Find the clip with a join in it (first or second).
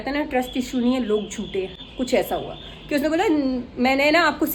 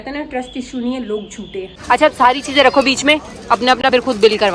second